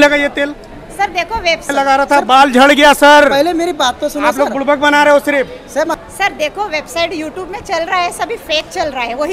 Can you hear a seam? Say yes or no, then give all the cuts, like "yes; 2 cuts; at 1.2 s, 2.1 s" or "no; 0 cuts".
yes; 2 cuts; at 1.7 s, 6.0 s